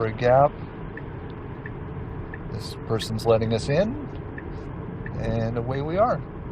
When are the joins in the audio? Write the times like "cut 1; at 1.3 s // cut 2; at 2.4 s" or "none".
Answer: none